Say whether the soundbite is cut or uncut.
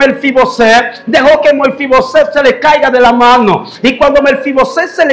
uncut